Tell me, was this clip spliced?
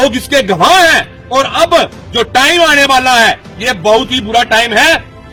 no; 0 cuts

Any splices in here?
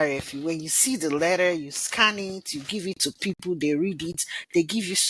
no; 0 cuts

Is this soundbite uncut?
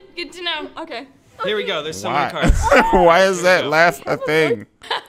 no; 1 cut; at 1.9 s

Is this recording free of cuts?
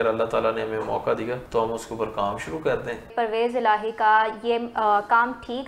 no; 2 cuts; at 1.4 s, 3.1 s

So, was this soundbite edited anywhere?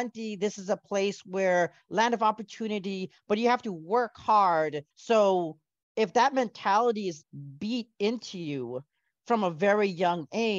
yes; 1 cut; at 4.9 s

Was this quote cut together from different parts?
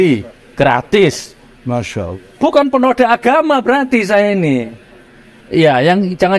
no; 0 cuts

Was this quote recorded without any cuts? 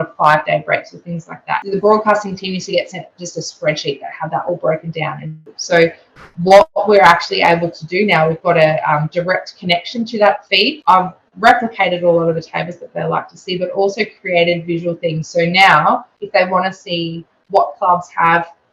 no; 3 cuts; at 1.6 s, 5.5 s, 10.8 s

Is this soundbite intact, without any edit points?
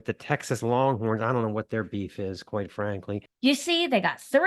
no; 1 cut; at 3.2 s

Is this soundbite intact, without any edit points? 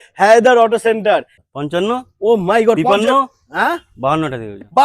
no; 1 cut; at 1.3 s

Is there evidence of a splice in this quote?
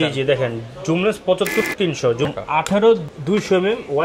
yes; 2 cuts; at 2.1 s, 3.1 s

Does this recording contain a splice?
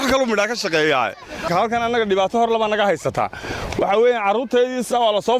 yes; 1 cut; at 1.4 s

